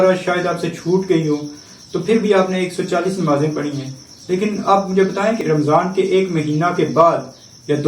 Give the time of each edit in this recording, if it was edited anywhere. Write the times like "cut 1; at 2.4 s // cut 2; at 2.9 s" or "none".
cut 1; at 5.4 s